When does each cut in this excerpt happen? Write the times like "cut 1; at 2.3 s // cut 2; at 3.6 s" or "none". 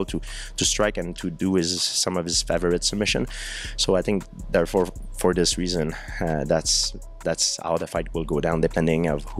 none